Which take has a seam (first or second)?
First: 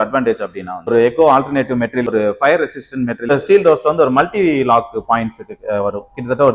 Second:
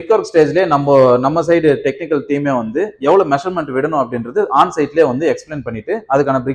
first